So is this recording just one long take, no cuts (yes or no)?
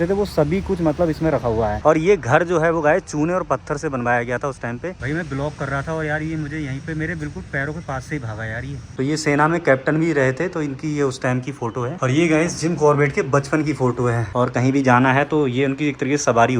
no